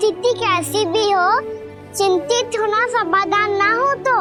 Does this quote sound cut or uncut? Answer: uncut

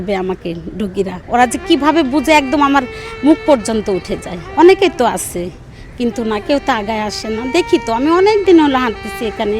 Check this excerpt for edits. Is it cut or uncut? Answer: cut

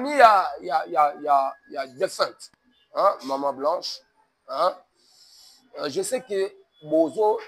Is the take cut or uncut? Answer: uncut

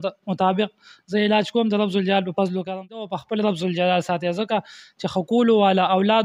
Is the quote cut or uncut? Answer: cut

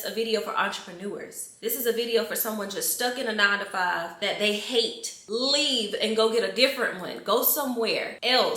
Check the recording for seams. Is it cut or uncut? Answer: uncut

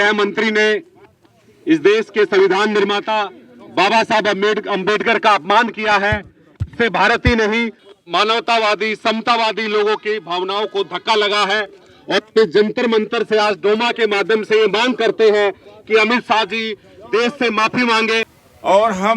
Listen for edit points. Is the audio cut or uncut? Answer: uncut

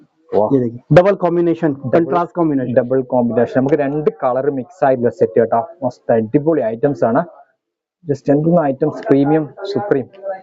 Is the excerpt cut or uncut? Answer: uncut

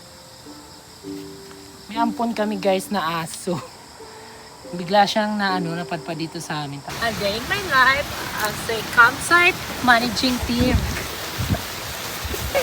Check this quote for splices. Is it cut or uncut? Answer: cut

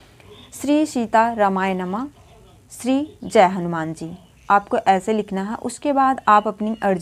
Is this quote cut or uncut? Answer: uncut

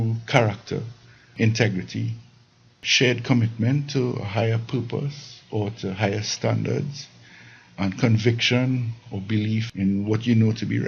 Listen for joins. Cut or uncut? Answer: cut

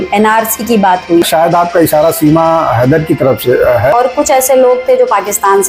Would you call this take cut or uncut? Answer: cut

